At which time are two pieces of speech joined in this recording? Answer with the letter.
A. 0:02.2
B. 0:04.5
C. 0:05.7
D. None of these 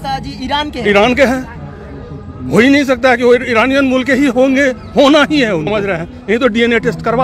C